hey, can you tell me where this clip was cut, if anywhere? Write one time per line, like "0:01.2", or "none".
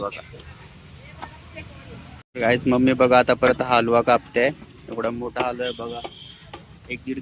0:02.1

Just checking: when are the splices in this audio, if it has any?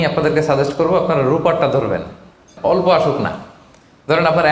0:02.5

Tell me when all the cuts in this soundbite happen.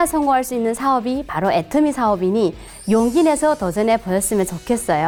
none

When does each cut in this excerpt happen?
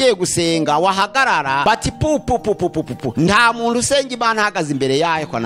0:01.6
0:03.1

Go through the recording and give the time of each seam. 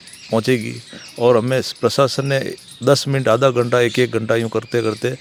none

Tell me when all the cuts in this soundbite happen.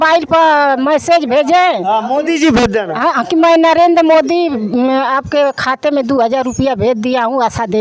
none

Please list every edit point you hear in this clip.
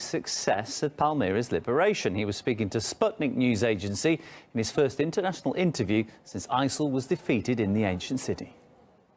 0:04.5

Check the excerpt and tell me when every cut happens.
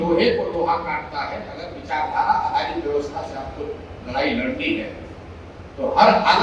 none

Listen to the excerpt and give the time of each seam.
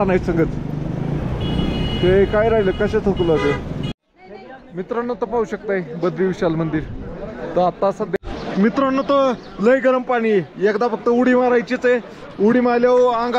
0:03.9
0:08.2

